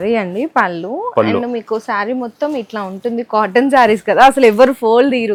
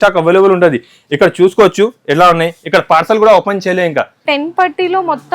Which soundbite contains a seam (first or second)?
second